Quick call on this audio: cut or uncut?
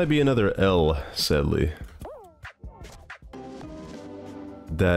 cut